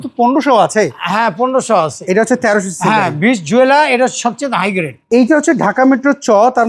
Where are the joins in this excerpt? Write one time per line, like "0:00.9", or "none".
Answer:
0:04.9